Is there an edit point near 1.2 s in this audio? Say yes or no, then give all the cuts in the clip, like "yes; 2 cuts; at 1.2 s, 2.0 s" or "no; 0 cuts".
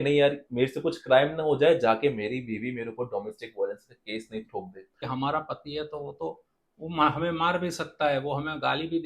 no; 1 cut; at 5.1 s